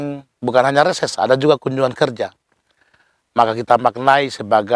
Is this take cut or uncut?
uncut